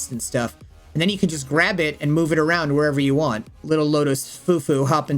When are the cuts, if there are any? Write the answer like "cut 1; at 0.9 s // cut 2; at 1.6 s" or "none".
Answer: cut 1; at 3.6 s